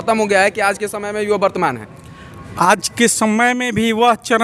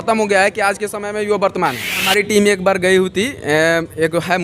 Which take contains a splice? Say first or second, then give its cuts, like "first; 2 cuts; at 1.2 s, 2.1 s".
second; 1 cut; at 1.9 s